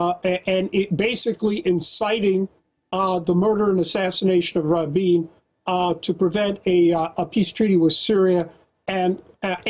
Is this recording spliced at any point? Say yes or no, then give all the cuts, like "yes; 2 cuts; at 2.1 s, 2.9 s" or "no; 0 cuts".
yes; 1 cut; at 7.8 s